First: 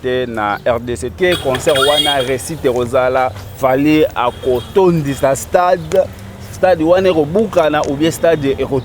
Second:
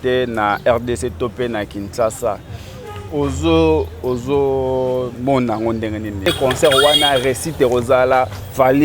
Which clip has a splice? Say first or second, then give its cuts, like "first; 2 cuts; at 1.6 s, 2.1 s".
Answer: first; 1 cut; at 1.2 s